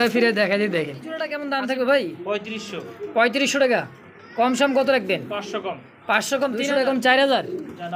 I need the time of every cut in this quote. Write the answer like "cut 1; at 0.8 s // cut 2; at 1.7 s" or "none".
cut 1; at 1.4 s // cut 2; at 6.6 s